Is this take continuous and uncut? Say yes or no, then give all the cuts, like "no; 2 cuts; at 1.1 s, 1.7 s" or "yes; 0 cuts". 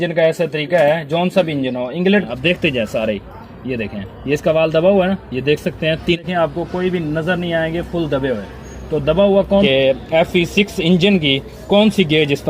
no; 3 cuts; at 2.2 s, 6.2 s, 9.7 s